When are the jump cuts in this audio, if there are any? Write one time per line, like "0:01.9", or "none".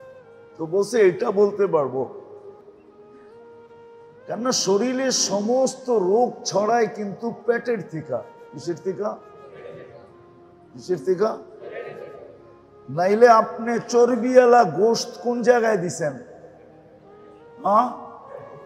none